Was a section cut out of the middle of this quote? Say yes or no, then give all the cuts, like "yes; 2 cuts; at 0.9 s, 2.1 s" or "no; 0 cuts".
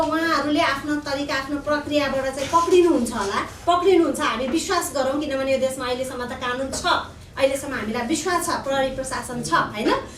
no; 0 cuts